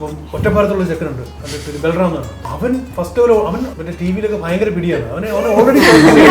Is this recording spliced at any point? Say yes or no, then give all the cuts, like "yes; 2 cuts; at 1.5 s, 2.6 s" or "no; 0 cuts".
yes; 2 cuts; at 2.4 s, 3.7 s